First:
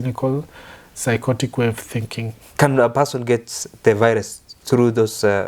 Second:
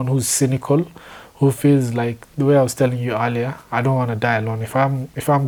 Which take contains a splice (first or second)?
first